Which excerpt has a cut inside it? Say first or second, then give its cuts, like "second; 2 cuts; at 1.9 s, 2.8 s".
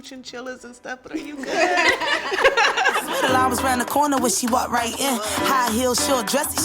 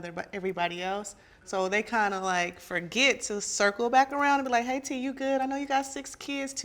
first; 1 cut; at 3.1 s